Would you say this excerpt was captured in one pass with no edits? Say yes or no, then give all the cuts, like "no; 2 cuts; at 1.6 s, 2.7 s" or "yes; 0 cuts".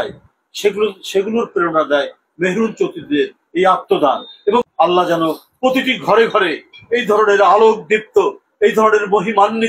no; 1 cut; at 4.7 s